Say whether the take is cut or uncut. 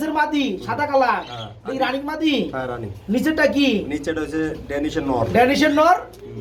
uncut